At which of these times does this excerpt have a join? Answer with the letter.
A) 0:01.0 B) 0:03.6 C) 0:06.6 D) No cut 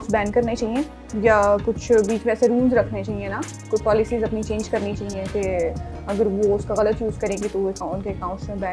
D